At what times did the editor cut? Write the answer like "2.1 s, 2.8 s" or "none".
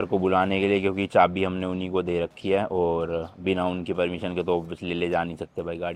none